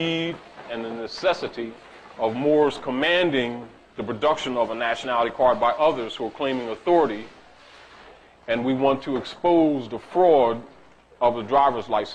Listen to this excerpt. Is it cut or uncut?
uncut